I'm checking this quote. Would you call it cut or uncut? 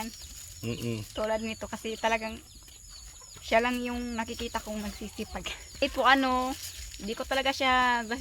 cut